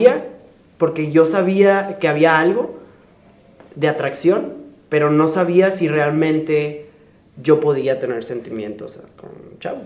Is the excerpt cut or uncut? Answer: uncut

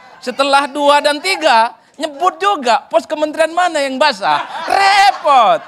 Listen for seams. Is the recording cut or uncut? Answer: uncut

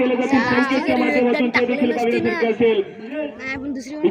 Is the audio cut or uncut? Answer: uncut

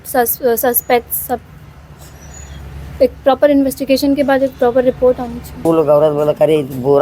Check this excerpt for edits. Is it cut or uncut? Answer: cut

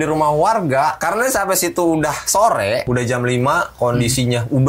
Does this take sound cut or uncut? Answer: cut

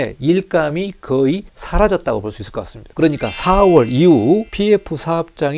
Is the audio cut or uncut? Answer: cut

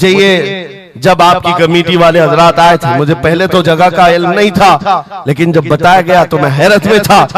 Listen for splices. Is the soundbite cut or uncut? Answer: uncut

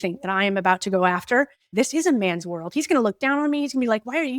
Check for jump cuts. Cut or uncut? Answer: cut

